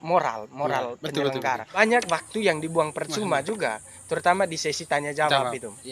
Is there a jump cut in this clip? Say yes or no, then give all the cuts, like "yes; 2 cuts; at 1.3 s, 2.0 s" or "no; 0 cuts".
yes; 1 cut; at 1.8 s